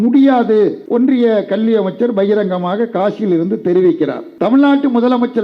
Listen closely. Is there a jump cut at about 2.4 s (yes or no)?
no